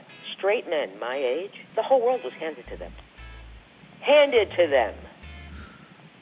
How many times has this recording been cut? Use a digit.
1